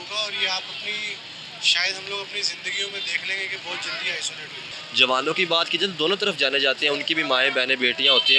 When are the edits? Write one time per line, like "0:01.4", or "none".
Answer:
0:04.8